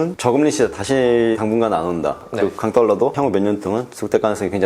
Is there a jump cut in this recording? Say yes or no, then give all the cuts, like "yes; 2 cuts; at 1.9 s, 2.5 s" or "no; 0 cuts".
yes; 1 cut; at 2.2 s